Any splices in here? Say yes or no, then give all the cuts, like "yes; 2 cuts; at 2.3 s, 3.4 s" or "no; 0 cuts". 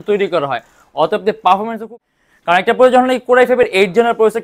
yes; 1 cut; at 1.8 s